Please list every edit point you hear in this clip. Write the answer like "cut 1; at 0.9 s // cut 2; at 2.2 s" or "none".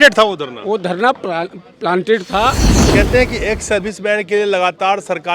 cut 1; at 2.8 s